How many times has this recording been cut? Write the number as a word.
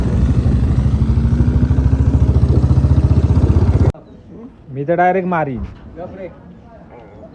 one